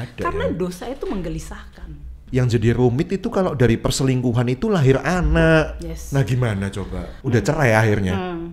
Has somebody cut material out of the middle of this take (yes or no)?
yes